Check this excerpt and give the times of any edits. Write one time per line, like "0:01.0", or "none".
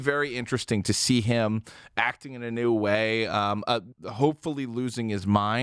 0:04.0

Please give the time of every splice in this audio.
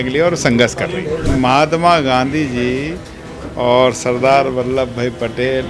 0:01.2

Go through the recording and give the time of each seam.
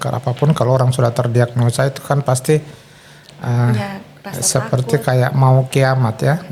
none

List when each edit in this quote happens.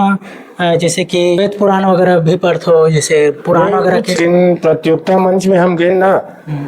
0:01.4
0:04.2

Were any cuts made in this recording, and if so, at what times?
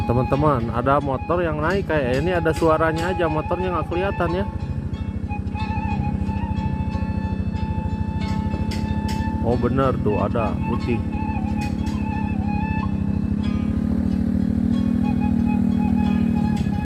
none

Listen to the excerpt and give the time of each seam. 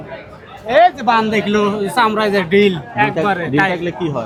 none

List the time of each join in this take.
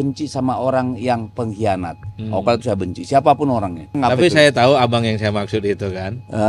0:03.9

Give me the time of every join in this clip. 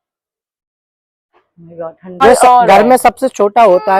0:02.2

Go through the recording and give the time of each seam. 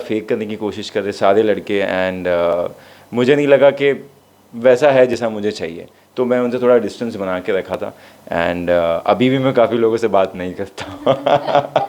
none

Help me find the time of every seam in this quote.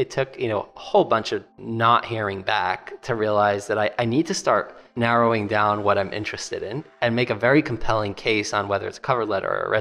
0:01.6
0:04.8

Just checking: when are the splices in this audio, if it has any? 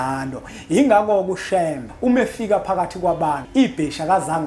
0:01.8
0:03.4

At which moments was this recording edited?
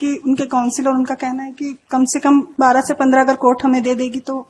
0:02.5

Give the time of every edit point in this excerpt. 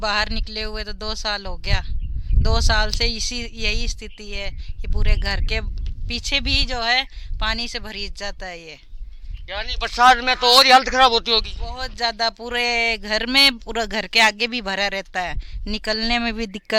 none

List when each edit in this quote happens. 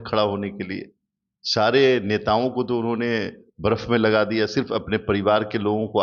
none

